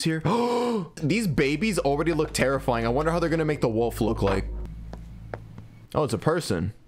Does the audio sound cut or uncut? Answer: cut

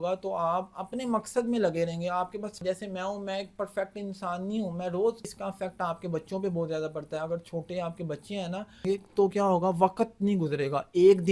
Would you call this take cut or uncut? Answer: cut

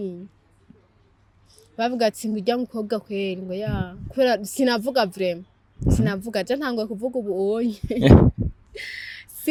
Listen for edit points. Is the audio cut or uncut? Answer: uncut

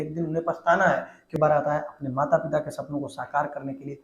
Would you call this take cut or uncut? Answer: cut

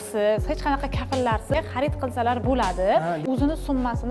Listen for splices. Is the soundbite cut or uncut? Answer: cut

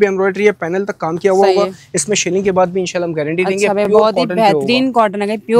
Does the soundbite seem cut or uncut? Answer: uncut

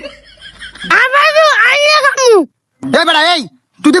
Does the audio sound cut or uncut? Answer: uncut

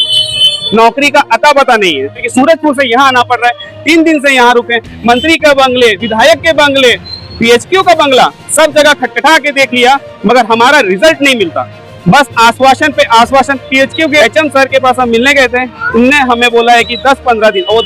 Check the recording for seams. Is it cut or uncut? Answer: cut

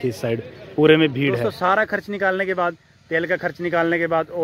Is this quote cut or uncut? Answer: cut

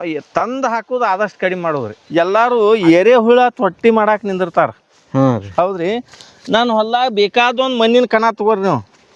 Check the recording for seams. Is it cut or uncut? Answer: cut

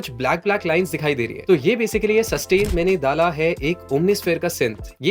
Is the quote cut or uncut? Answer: cut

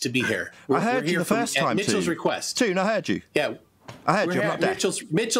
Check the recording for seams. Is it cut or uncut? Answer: uncut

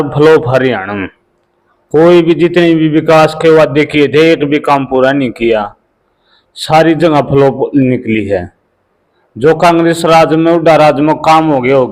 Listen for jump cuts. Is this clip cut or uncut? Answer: uncut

